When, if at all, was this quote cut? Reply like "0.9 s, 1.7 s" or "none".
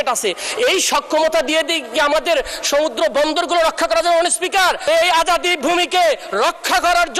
4.8 s